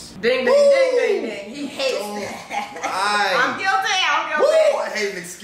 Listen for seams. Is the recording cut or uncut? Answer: uncut